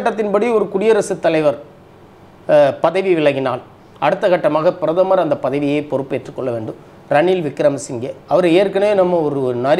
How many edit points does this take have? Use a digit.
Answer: 0